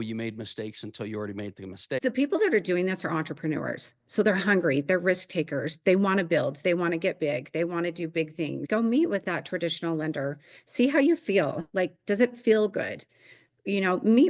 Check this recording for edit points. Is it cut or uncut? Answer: cut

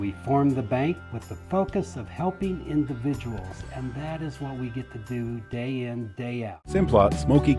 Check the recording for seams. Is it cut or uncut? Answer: cut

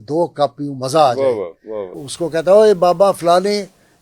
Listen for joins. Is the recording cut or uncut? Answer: cut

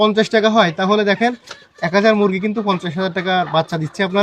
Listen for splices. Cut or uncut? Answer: uncut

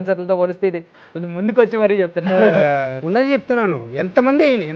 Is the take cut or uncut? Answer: cut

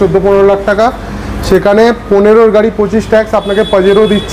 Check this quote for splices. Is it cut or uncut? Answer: uncut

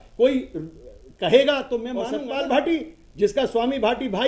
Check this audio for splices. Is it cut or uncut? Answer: cut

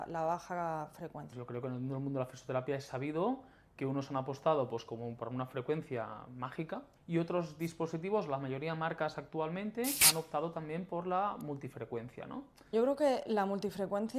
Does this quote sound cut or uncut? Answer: cut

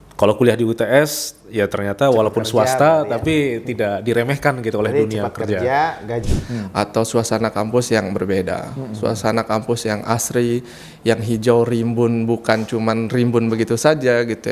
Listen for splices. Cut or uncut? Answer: cut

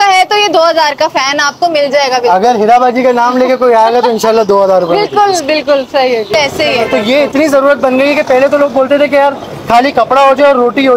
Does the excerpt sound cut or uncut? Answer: cut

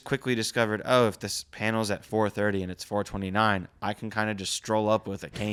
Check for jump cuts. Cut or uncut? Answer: uncut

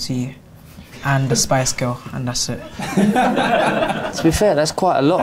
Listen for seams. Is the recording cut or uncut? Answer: uncut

